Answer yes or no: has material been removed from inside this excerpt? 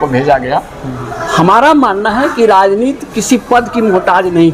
yes